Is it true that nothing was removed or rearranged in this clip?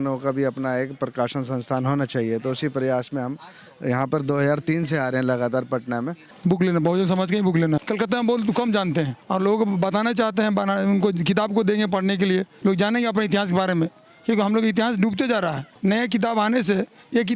no; 5 cuts; at 6.2 s, 7.8 s, 9.2 s, 12.5 s, 15.7 s

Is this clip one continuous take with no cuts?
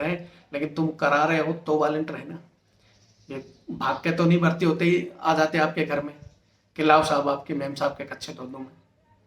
yes; 0 cuts

